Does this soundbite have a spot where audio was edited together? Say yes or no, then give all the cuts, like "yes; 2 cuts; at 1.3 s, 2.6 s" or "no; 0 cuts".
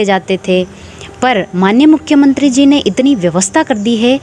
no; 0 cuts